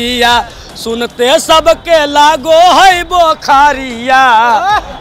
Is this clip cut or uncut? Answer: uncut